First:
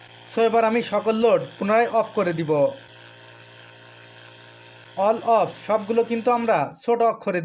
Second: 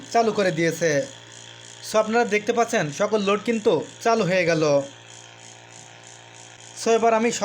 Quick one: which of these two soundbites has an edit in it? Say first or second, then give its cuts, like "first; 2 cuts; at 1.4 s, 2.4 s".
first; 2 cuts; at 2.9 s, 4.8 s